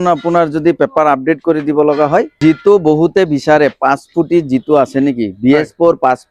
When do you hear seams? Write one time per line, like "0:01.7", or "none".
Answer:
0:02.3